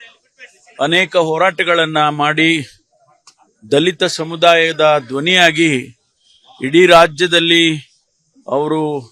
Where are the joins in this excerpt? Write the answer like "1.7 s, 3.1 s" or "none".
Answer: none